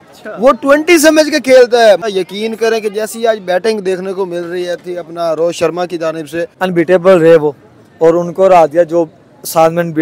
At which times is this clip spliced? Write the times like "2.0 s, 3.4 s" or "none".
2.1 s, 6.5 s